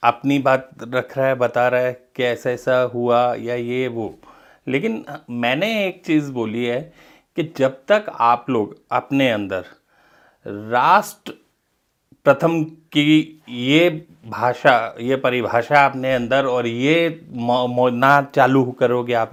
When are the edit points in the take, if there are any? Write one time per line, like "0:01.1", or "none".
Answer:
none